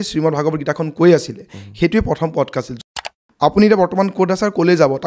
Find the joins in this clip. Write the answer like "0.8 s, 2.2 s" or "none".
2.8 s

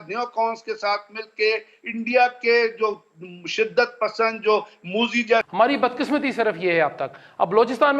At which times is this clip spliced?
5.5 s

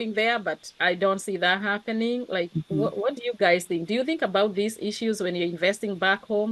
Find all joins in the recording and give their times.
none

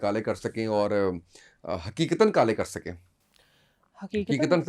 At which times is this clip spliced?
none

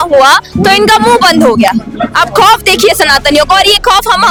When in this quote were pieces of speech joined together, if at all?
none

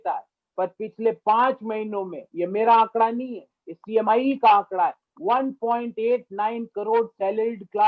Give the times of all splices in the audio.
none

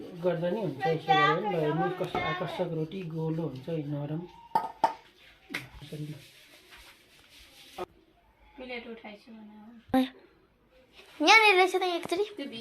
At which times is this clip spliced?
11.1 s

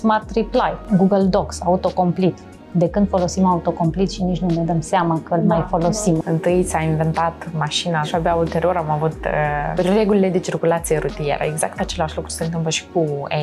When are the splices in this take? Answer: 0.8 s, 6.2 s, 8.1 s, 9.7 s

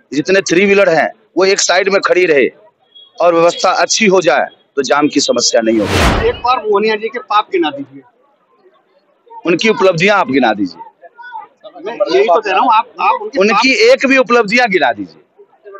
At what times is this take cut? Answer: 6.0 s

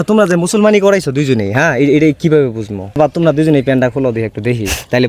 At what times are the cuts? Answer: 3.0 s

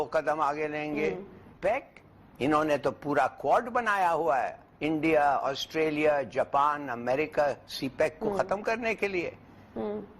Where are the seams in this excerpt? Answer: 1.6 s

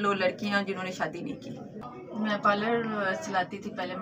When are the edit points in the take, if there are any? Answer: 1.9 s

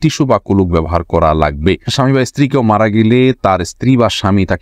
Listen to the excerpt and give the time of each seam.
1.9 s

